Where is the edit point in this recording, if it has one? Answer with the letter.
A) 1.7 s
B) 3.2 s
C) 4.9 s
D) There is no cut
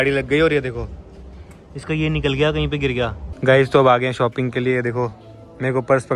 B